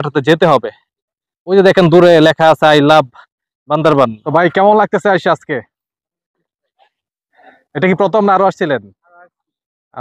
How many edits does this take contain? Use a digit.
1